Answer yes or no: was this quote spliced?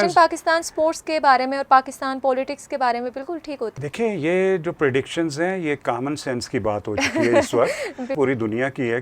yes